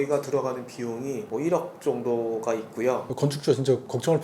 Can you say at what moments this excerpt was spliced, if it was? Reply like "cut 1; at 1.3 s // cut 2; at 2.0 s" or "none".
cut 1; at 1.2 s // cut 2; at 3.1 s

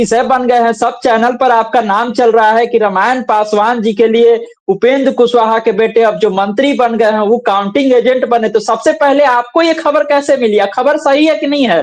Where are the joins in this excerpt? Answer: none

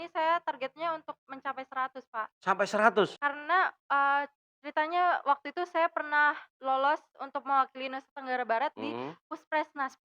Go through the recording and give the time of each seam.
cut 1; at 3.2 s

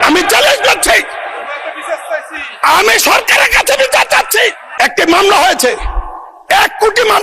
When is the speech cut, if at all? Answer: cut 1; at 4.6 s

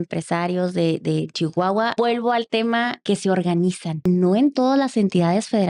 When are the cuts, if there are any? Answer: cut 1; at 1.9 s // cut 2; at 3.0 s // cut 3; at 4.0 s

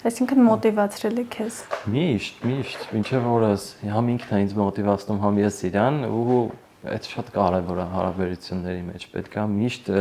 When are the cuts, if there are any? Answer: none

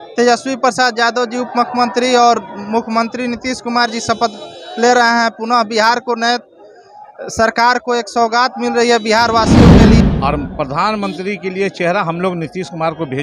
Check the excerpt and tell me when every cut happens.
cut 1; at 9.5 s // cut 2; at 10.1 s

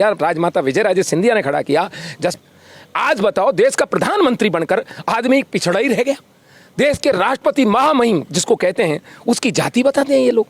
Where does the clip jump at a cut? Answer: cut 1; at 2.3 s

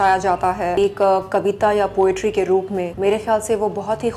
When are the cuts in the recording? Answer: cut 1; at 0.8 s // cut 2; at 2.9 s

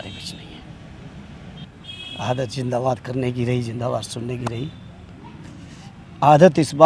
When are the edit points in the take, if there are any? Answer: cut 1; at 1.7 s

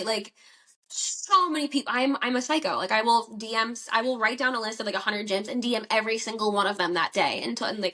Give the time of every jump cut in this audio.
none

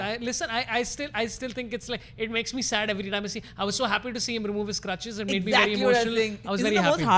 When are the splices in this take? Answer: none

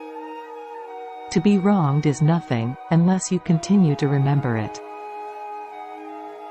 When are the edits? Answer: cut 1; at 1.1 s // cut 2; at 4.7 s

